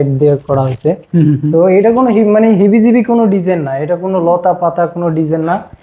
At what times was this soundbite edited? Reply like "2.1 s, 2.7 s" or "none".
none